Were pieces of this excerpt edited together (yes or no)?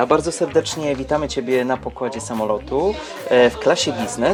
no